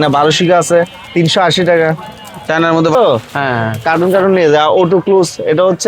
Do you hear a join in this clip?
yes; 1 cut; at 2.9 s

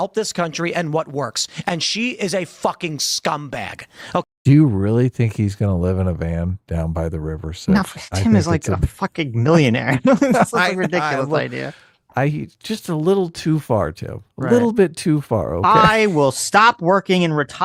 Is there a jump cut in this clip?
no; 0 cuts

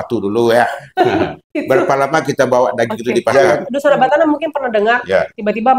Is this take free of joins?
no; 1 cut; at 3.3 s

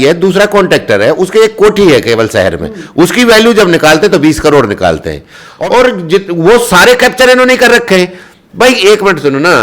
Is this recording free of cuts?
no; 1 cut; at 5.5 s

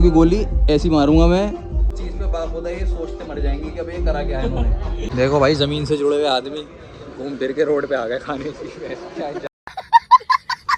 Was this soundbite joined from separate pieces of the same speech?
yes; 2 cuts; at 1.9 s, 5.1 s

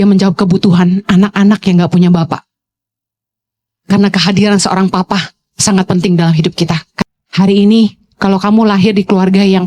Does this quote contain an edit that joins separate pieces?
yes; 1 cut; at 6.9 s

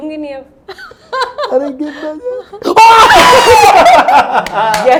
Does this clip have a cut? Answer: no; 0 cuts

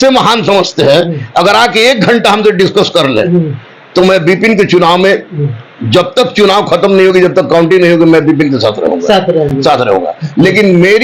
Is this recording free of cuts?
yes; 0 cuts

